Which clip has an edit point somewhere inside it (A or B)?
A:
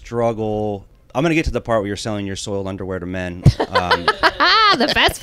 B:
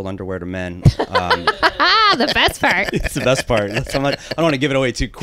A